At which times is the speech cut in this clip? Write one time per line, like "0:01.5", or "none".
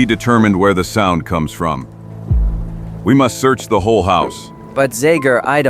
0:03.0